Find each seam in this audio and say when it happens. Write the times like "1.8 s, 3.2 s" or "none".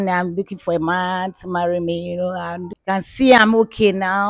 2.7 s